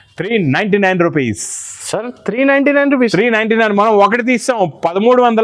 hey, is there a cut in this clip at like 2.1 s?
no; 0 cuts

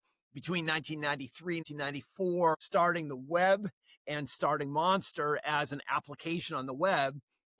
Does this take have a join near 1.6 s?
yes; 2 cuts; at 1.6 s, 2.6 s

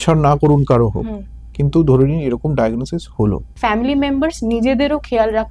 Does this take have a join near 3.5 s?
yes; 1 cut; at 3.5 s

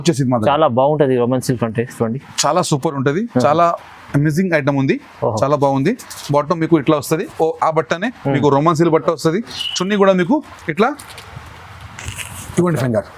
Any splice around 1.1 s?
no; 0 cuts

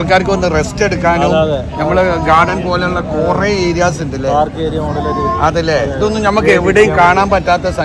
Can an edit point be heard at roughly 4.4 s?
no; 0 cuts

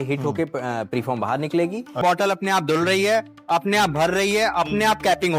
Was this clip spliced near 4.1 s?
no; 1 cut; at 2.0 s

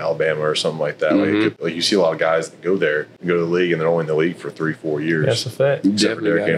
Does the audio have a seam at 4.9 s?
no; 2 cuts; at 1.6 s, 3.1 s

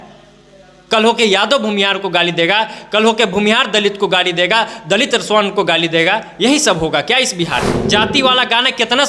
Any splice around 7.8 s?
yes; 1 cut; at 7.8 s

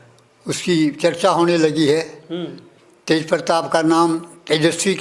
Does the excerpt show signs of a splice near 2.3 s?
no; 0 cuts

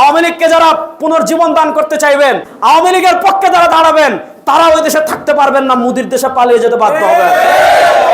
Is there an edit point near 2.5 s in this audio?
yes; 1 cut; at 2.5 s

